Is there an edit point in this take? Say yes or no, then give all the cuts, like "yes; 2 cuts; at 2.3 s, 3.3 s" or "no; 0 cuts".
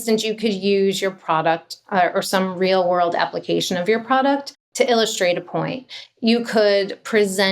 yes; 1 cut; at 4.6 s